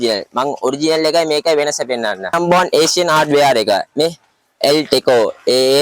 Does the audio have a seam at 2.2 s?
yes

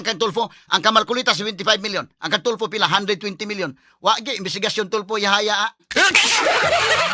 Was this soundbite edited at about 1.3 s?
no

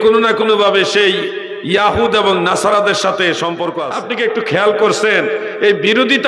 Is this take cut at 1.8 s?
no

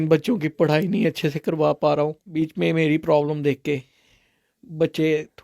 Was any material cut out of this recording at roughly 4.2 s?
no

